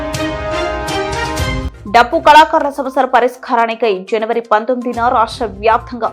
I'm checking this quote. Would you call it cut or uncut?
cut